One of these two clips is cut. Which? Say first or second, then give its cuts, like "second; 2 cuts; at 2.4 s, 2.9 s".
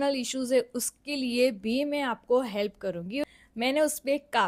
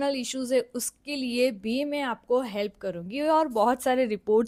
first; 1 cut; at 3.2 s